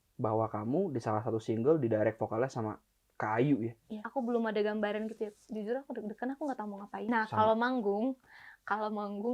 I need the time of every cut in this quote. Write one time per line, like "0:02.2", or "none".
0:04.0
0:07.0